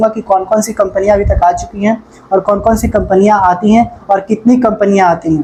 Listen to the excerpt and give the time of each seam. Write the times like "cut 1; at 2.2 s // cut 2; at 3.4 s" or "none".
none